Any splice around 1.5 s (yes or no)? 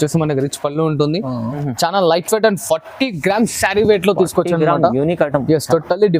yes